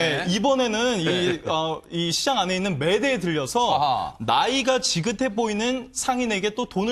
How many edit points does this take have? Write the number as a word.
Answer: one